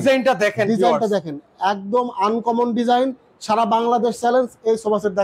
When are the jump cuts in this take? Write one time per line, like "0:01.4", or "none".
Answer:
none